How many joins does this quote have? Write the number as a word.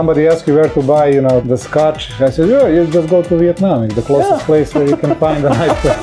one